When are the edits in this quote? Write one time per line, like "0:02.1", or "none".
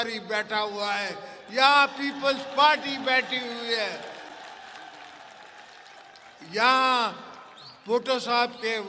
none

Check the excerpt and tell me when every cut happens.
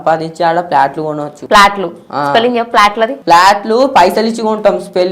0:01.3
0:03.2

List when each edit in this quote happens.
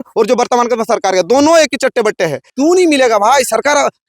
0:02.5

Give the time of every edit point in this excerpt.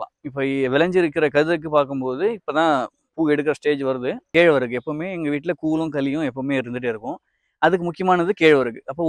0:04.2

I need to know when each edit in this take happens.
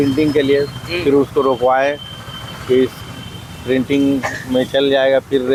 none

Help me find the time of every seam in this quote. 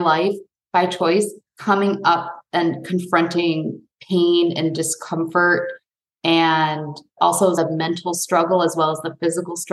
0:01.5
0:07.1

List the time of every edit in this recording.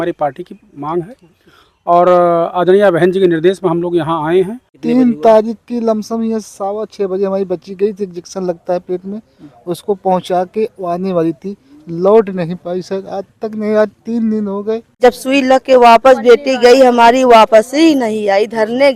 0:04.7
0:14.9

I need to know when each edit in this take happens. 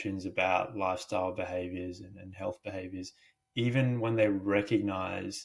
none

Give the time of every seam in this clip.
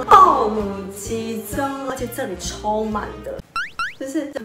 0:03.4

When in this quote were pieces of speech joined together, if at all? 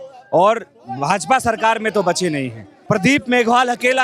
0:02.8

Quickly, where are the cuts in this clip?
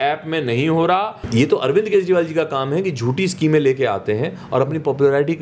0:01.2

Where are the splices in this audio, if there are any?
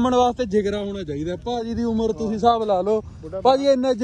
none

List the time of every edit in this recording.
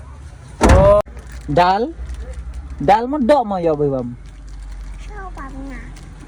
0:01.0

